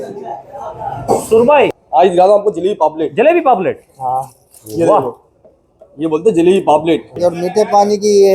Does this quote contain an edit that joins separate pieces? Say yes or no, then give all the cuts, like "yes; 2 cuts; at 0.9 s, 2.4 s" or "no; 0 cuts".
yes; 2 cuts; at 1.8 s, 7.1 s